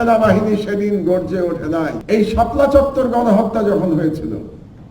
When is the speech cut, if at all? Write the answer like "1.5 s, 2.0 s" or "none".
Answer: 2.0 s